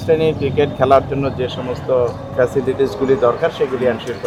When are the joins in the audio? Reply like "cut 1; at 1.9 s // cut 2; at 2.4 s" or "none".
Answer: none